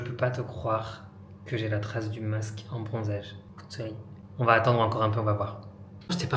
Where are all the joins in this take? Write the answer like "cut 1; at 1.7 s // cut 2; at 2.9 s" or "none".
none